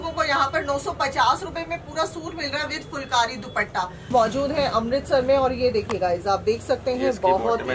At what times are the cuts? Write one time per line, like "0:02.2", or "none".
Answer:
0:04.1